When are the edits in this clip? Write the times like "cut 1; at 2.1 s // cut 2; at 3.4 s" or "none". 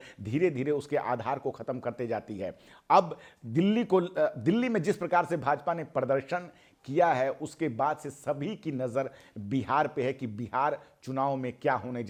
none